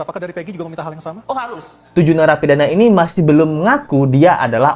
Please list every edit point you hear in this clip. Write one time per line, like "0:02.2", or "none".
0:01.8